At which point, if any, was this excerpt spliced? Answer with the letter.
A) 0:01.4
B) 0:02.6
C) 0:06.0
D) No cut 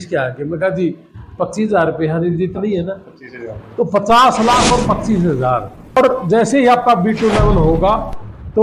C